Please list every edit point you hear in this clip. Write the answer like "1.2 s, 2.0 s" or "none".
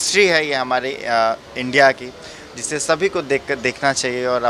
none